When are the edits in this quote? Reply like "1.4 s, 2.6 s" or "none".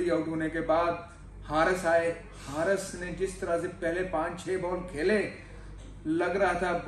none